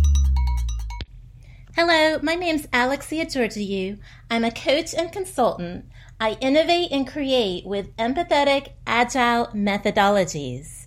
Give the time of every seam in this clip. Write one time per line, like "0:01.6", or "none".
0:01.0